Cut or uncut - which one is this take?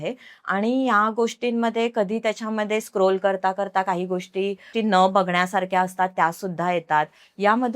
cut